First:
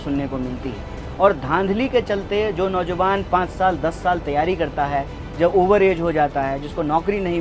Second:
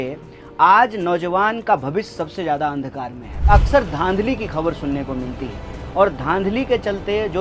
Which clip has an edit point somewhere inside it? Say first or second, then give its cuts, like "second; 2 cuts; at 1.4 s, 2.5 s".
second; 1 cut; at 3.3 s